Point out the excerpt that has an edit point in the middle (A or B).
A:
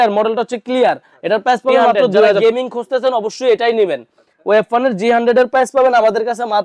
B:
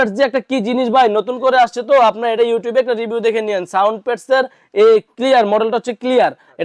A